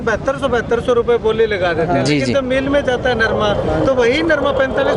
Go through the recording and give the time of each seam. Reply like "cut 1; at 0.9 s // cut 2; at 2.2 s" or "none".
none

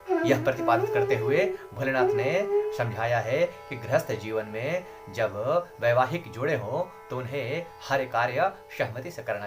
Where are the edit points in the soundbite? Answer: none

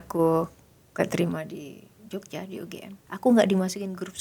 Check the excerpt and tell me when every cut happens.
cut 1; at 3.0 s

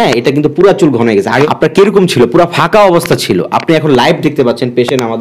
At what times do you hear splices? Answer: cut 1; at 1.4 s

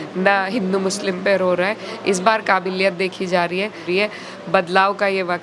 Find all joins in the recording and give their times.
cut 1; at 3.8 s

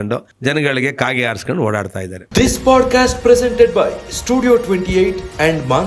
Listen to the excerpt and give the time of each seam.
cut 1; at 2.2 s

